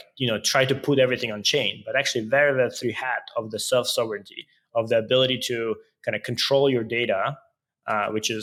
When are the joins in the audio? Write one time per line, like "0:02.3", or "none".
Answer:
none